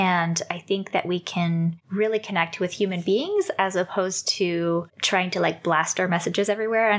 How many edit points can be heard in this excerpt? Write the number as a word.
two